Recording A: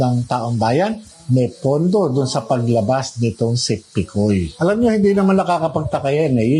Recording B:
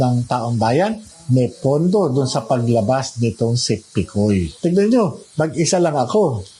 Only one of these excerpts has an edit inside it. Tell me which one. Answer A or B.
B